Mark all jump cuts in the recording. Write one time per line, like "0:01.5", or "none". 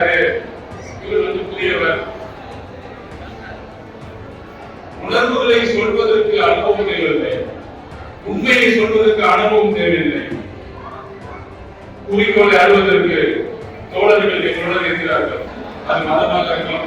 0:15.6